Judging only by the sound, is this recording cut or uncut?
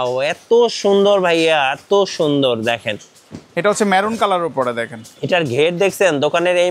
uncut